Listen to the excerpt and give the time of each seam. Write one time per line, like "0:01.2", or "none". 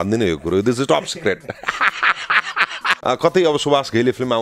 0:02.9